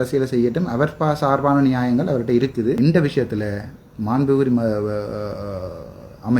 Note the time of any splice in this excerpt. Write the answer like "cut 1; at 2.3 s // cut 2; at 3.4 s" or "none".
cut 1; at 2.8 s